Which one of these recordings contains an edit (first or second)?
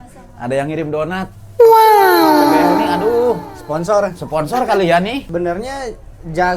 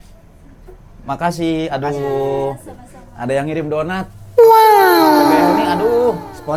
first